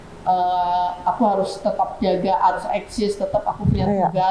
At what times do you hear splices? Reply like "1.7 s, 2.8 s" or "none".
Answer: none